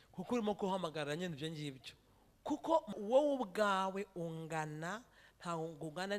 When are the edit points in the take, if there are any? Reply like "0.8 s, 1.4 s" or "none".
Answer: 3.0 s